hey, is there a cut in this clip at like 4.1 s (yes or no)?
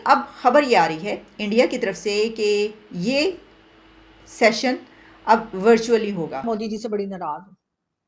no